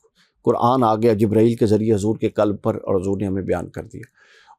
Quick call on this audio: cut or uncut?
uncut